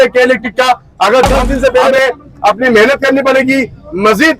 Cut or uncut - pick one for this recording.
cut